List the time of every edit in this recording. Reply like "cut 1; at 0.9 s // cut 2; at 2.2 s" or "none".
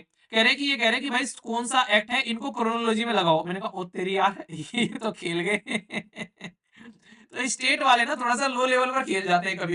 none